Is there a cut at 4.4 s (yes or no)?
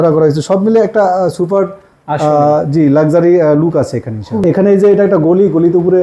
yes